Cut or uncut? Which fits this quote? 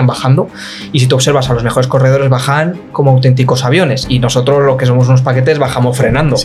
uncut